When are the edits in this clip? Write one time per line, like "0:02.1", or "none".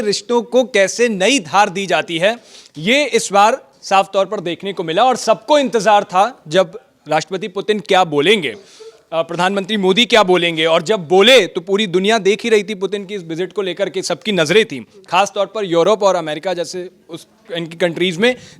none